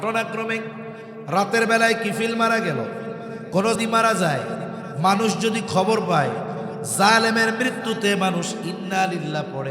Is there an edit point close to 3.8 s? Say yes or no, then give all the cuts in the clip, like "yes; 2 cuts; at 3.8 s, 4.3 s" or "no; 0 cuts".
yes; 1 cut; at 3.8 s